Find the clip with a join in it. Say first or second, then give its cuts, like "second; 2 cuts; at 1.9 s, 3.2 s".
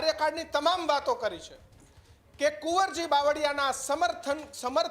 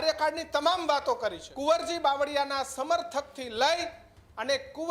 second; 1 cut; at 1.5 s